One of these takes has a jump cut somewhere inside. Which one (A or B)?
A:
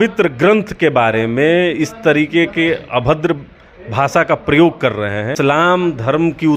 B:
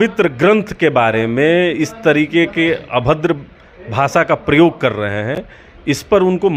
A